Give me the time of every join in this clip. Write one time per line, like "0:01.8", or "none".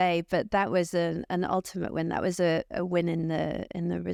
none